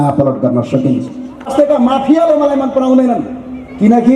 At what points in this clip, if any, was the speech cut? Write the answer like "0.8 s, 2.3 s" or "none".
1.5 s